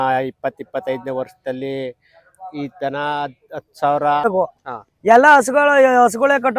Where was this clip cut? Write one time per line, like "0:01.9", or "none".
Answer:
0:04.3